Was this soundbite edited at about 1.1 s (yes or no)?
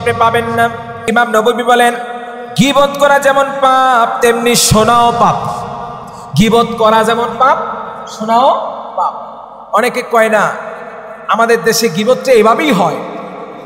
yes